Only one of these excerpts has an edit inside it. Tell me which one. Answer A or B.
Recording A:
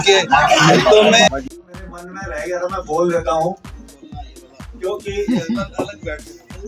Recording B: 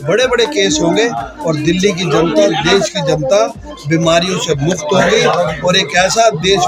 A